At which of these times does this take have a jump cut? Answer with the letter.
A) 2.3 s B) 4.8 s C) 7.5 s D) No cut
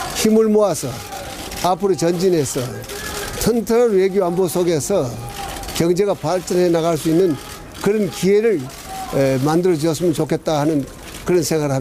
B